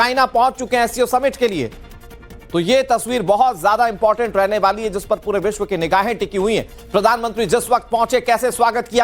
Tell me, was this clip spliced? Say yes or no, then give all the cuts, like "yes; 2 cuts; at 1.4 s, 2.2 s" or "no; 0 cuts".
yes; 1 cut; at 7.3 s